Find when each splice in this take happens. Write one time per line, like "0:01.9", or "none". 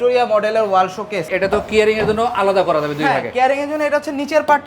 0:01.3